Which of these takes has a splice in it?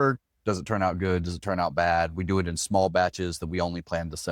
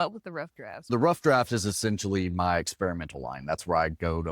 second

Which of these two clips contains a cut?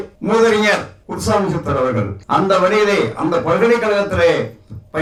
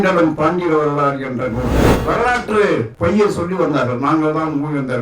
second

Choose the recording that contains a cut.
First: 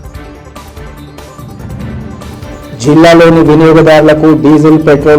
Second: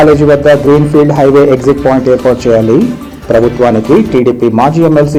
first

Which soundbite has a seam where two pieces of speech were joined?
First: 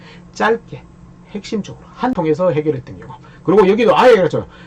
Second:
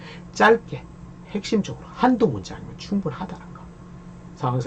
first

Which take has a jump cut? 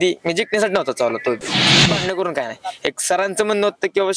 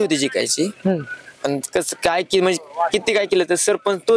first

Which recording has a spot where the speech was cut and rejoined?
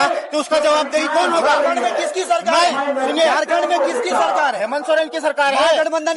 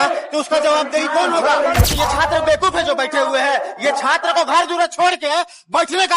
second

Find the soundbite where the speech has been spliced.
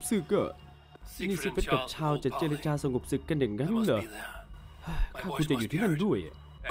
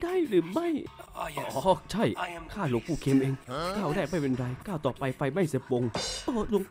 second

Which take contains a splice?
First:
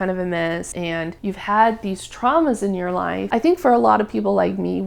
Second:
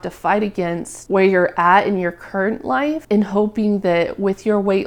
first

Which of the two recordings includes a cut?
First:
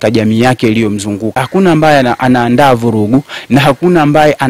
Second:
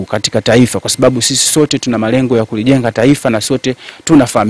first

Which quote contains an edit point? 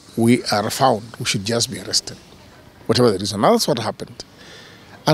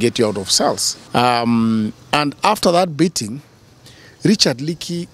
second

